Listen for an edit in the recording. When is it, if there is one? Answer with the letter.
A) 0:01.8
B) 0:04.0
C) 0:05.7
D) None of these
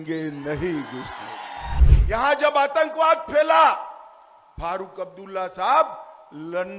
A